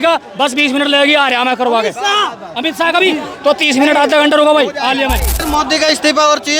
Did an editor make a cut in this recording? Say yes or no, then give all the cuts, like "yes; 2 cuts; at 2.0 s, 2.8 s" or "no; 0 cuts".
yes; 1 cut; at 5.4 s